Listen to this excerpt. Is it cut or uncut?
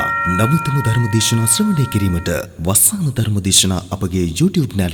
uncut